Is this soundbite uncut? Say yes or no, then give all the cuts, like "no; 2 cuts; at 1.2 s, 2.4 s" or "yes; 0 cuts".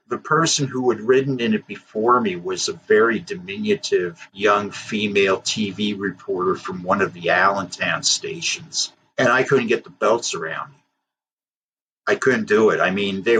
yes; 0 cuts